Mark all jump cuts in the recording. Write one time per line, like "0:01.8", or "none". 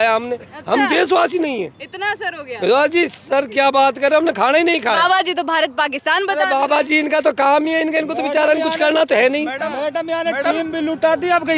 none